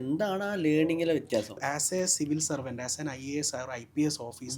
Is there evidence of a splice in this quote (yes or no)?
yes